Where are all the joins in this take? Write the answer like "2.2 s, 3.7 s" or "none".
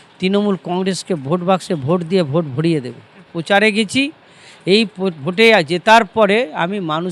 3.2 s